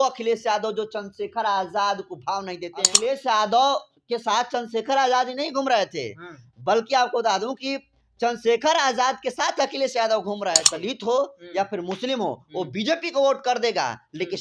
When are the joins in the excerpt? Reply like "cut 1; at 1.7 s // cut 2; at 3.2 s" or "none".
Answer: cut 1; at 2.9 s // cut 2; at 10.7 s